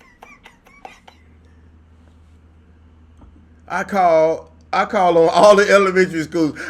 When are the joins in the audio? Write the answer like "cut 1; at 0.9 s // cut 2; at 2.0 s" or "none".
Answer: cut 1; at 1.2 s